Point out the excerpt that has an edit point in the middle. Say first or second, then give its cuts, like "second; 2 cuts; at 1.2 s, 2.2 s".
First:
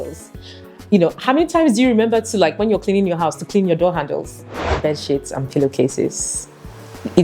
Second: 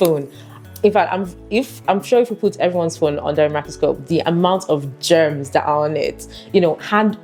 first; 1 cut; at 4.7 s